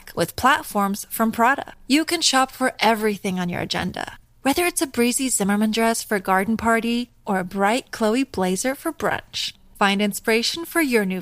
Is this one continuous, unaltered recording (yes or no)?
yes